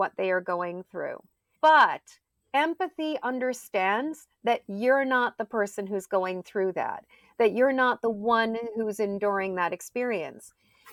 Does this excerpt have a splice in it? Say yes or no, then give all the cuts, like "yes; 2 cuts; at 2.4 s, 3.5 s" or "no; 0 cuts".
no; 0 cuts